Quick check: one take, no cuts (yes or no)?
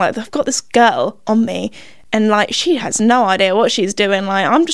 yes